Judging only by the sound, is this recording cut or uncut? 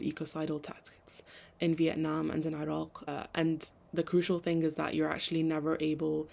cut